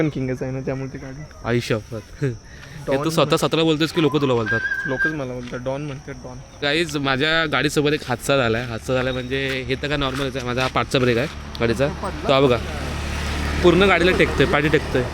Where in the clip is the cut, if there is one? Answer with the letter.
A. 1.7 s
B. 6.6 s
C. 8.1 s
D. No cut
B